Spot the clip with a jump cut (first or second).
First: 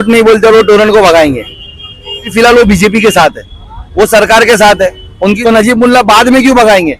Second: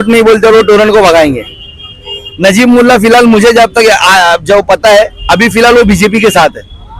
first